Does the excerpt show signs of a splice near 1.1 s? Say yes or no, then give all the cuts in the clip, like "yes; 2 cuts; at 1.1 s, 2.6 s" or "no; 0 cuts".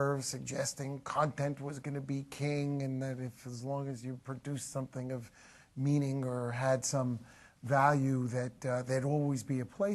yes; 1 cut; at 1.1 s